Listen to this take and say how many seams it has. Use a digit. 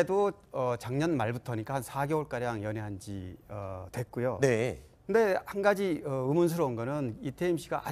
0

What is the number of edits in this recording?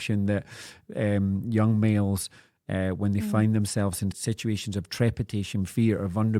1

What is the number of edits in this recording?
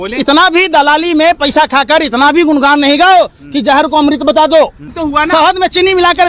1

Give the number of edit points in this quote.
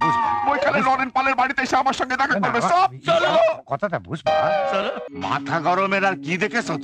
1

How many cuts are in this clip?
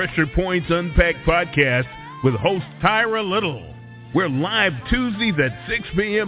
0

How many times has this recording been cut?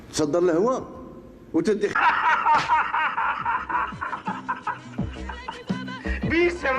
0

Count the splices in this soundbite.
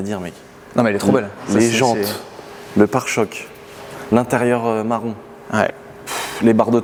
0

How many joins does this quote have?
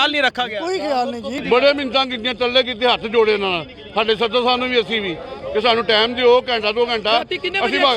0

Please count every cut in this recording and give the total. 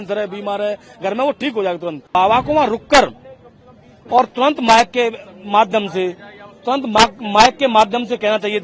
1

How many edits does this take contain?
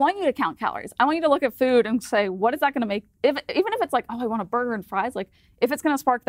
0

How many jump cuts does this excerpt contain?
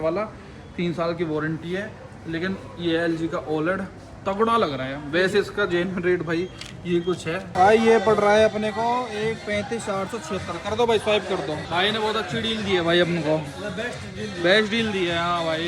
1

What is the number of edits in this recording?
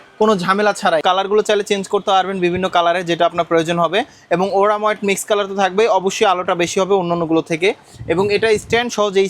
1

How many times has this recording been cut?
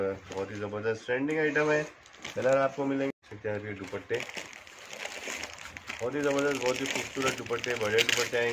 1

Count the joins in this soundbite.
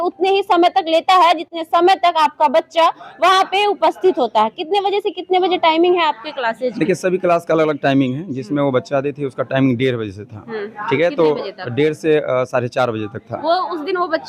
0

